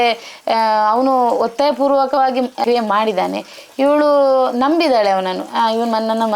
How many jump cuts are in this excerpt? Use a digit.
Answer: 1